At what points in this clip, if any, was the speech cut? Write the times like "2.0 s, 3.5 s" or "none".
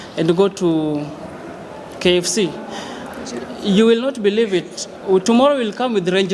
none